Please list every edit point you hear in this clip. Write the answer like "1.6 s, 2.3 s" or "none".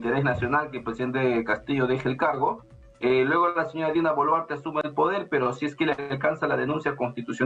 none